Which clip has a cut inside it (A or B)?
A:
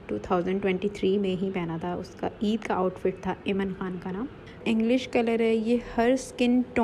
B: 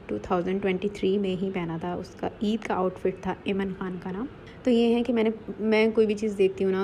A